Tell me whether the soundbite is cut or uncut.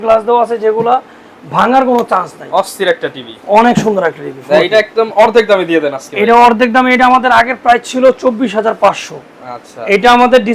uncut